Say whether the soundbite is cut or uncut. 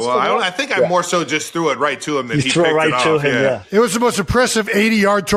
uncut